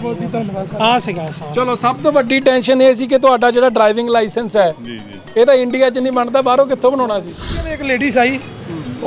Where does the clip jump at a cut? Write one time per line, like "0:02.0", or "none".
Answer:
0:07.7